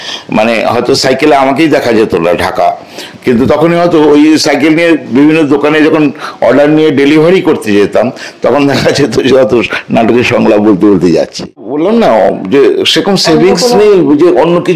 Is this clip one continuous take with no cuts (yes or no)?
no